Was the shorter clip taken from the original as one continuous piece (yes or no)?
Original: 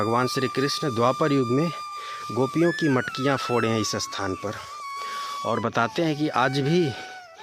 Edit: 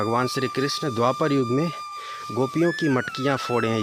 yes